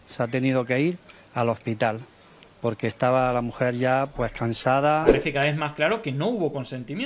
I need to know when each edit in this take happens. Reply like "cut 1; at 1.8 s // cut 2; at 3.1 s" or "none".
cut 1; at 5.1 s

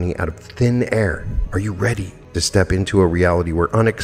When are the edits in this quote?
cut 1; at 1.3 s // cut 2; at 2.2 s

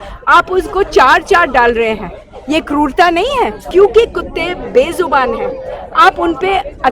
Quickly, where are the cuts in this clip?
cut 1; at 3.6 s

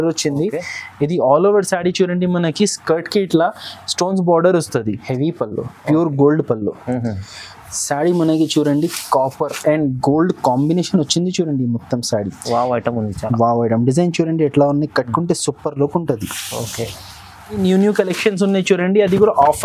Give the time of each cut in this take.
cut 1; at 5.0 s // cut 2; at 17.6 s

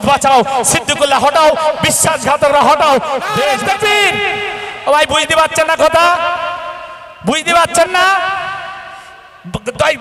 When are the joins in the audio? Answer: cut 1; at 3.4 s

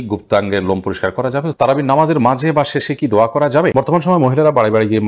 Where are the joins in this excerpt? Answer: cut 1; at 1.5 s // cut 2; at 3.7 s

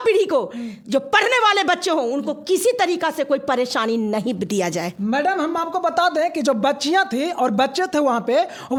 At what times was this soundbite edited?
none

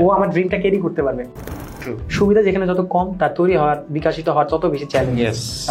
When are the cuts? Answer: cut 1; at 1.5 s

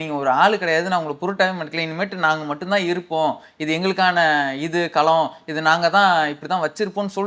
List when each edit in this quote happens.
none

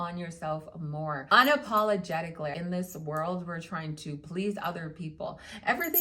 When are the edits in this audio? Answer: cut 1; at 1.2 s // cut 2; at 2.5 s

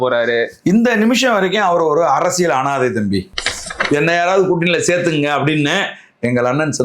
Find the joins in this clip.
cut 1; at 3.7 s

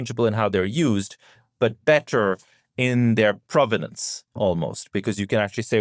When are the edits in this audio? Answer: none

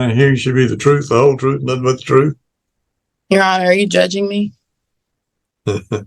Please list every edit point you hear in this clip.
none

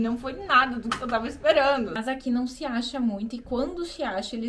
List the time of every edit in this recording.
cut 1; at 2.0 s

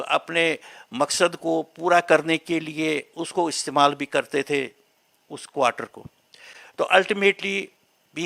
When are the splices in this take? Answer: none

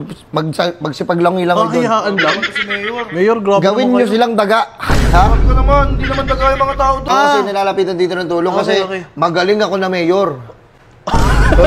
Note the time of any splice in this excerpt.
cut 1; at 7.0 s

